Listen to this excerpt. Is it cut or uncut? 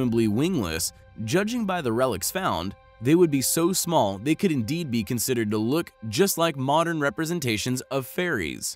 uncut